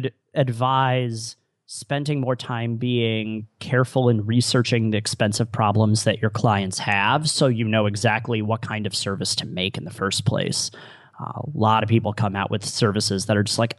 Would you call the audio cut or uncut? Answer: uncut